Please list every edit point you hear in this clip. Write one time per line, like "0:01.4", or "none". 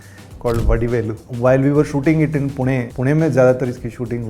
0:01.2
0:02.9

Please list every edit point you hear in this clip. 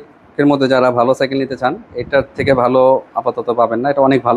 none

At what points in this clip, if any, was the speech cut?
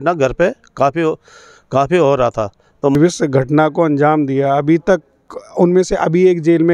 0:02.9

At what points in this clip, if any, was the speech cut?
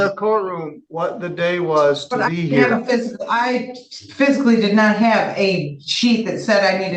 none

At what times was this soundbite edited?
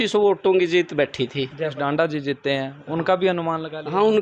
0:01.8

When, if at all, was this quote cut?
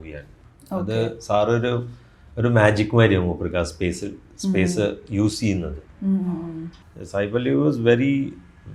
0:06.7

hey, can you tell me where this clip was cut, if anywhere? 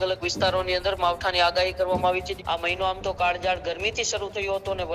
0:02.3

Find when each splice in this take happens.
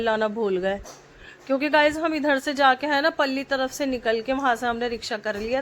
none

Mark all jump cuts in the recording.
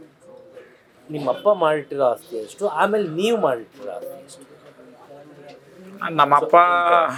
none

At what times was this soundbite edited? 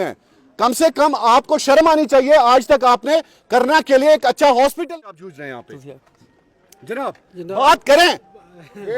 0:04.9

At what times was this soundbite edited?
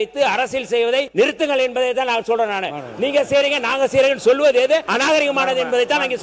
0:01.1
0:04.9

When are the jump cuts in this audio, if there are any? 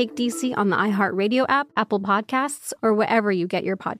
0:01.7

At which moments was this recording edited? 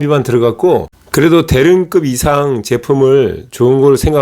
0:00.9

